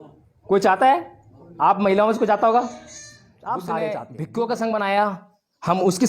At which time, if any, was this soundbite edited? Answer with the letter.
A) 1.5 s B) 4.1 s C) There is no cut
B